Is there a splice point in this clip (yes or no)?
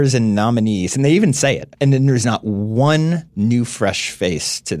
yes